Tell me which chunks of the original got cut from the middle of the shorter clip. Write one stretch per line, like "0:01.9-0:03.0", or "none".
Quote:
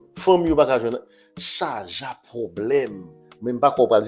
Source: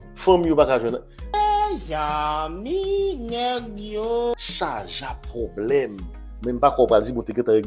0:01.3-0:04.3